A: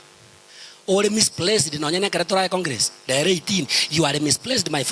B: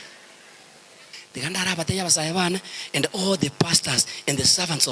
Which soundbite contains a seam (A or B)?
B